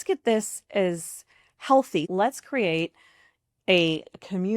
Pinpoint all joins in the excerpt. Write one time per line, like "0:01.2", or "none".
0:02.1